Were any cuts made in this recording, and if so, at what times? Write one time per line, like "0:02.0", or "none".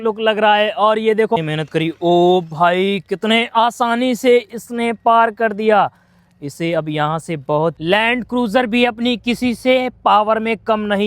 0:01.4
0:07.8